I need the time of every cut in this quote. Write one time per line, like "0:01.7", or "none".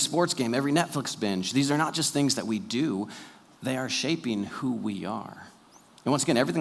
none